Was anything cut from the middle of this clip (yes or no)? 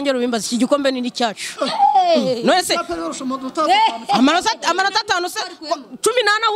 no